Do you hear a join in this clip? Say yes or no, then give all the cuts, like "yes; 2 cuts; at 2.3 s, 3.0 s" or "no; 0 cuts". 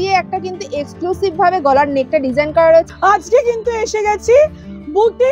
yes; 1 cut; at 2.9 s